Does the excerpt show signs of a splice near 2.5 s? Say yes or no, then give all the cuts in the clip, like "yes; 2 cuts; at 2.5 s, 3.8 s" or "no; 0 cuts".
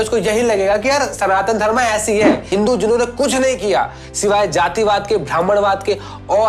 yes; 1 cut; at 2.5 s